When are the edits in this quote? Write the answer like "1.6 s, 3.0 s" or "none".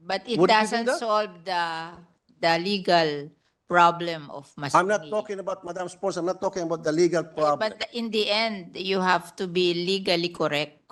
none